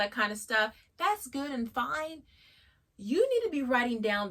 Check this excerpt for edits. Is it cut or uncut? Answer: uncut